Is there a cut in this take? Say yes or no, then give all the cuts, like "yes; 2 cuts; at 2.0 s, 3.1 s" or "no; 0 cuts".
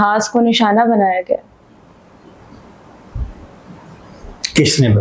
no; 0 cuts